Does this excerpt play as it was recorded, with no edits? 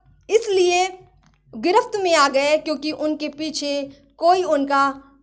yes; 0 cuts

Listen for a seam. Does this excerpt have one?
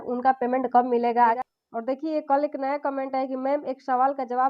yes; 1 cut; at 1.4 s

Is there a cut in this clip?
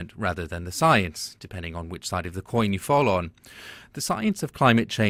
no; 0 cuts

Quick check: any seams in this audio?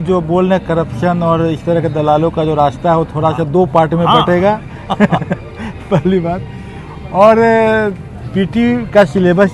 no; 0 cuts

